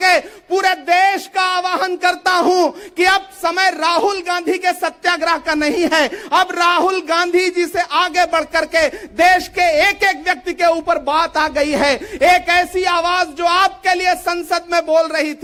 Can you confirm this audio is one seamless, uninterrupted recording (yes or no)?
yes